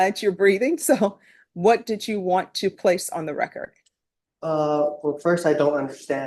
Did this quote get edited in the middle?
no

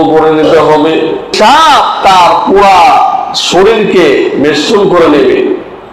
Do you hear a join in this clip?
yes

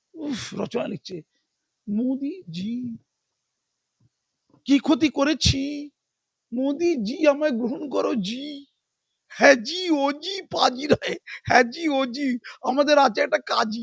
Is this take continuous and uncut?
yes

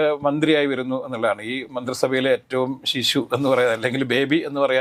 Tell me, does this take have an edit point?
no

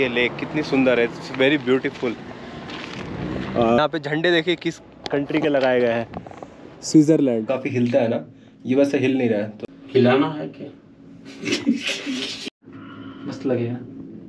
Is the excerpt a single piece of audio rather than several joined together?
no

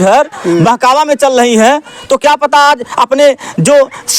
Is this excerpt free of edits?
yes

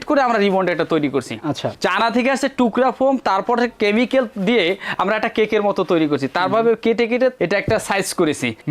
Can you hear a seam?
no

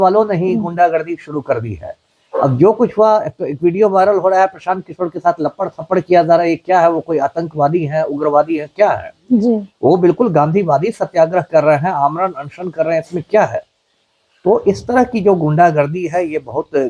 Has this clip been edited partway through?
no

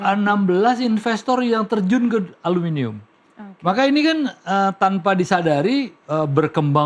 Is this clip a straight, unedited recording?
yes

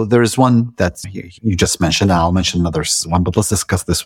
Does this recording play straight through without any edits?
yes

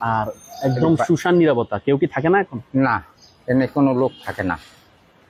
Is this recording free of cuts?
yes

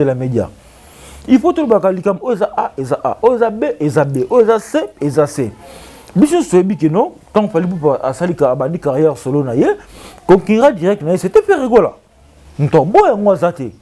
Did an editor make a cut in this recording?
no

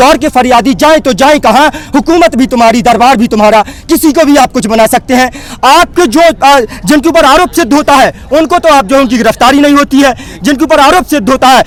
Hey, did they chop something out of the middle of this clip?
no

